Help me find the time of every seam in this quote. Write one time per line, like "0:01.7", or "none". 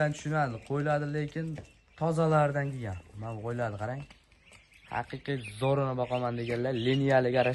none

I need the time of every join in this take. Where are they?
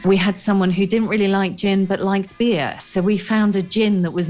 none

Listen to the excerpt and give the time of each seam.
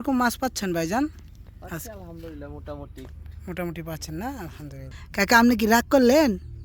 0:05.0

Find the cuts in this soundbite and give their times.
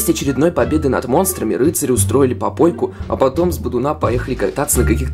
none

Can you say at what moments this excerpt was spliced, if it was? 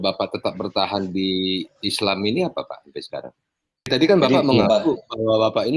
0:03.9

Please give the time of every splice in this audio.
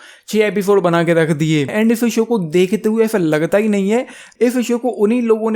0:01.7
0:04.2

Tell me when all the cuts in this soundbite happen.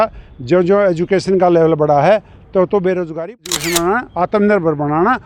0:03.4

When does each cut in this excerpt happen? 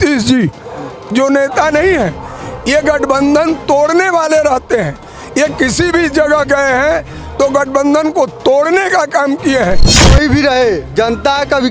0:10.1

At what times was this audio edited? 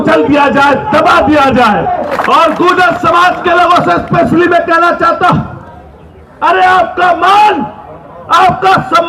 0:02.2

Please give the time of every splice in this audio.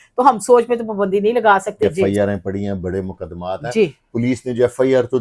0:01.9

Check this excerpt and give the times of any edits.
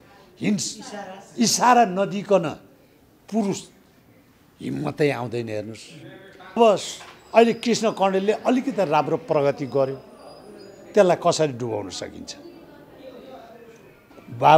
0:06.6

